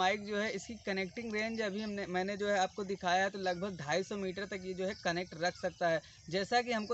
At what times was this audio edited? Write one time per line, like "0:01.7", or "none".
none